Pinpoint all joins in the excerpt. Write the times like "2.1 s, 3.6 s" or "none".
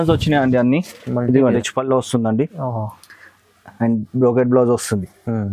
1.6 s